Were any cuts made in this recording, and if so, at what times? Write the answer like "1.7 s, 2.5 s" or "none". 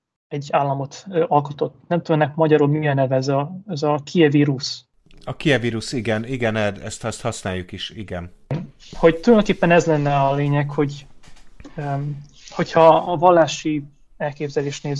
none

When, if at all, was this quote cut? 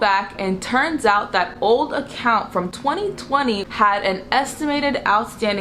3.6 s

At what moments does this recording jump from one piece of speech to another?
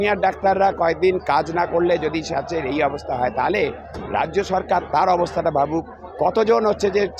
none

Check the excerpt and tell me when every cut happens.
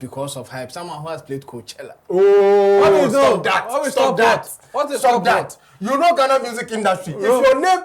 none

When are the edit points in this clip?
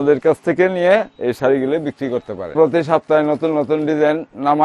2.5 s

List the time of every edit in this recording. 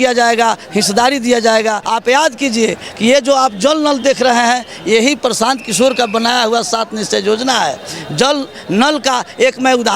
1.8 s

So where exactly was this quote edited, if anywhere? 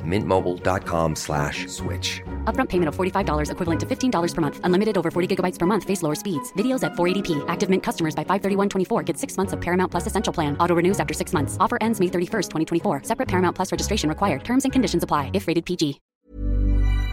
16.1 s

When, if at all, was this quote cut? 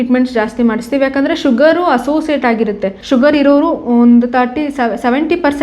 2.9 s

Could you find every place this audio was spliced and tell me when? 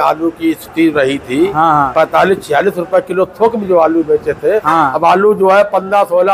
4.9 s

